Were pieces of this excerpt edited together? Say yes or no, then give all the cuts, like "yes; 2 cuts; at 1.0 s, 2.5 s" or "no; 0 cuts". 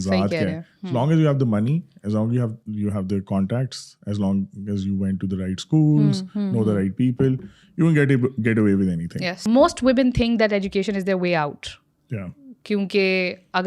yes; 1 cut; at 9.2 s